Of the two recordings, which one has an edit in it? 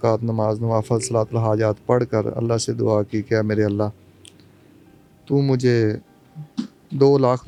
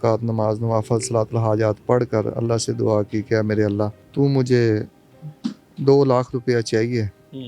second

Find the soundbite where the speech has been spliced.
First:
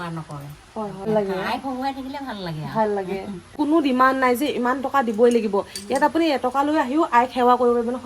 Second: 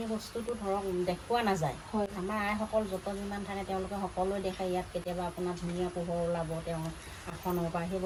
first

